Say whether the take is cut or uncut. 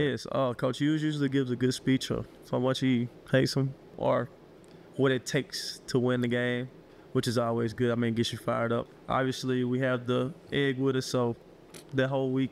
cut